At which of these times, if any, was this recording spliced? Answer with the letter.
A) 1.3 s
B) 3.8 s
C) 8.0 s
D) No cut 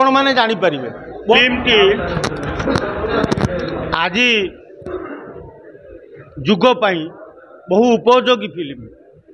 A